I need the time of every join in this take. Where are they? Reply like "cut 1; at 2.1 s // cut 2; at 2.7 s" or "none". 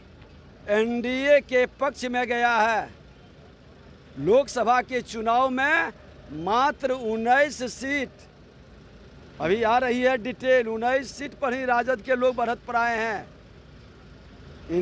none